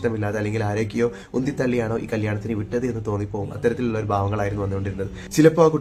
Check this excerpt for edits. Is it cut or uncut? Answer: uncut